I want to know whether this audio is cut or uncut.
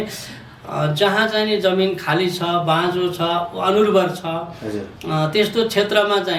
uncut